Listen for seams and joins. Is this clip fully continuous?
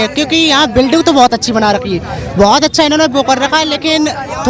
yes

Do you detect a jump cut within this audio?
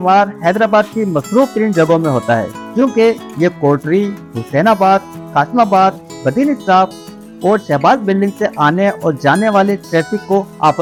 no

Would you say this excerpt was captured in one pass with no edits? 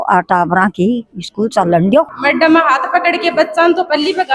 no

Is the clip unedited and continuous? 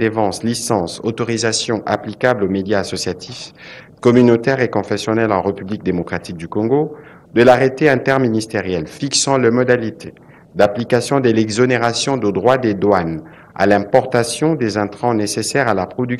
yes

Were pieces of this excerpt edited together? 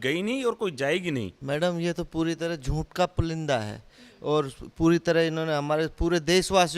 yes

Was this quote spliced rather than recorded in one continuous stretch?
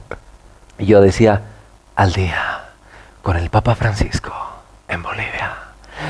no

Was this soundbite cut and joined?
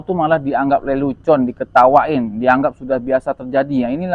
no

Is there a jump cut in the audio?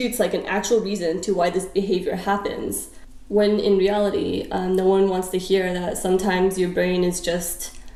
no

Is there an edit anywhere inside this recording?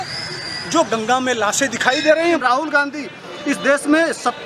yes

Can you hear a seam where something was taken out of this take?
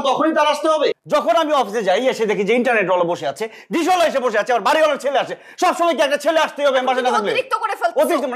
yes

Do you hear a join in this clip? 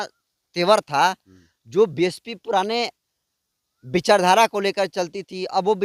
no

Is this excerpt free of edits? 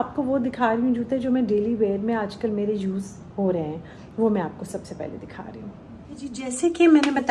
yes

